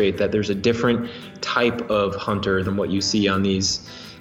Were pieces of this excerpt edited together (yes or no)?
yes